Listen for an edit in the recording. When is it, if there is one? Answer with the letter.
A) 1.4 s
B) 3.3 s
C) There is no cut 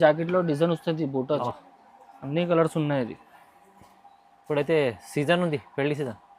A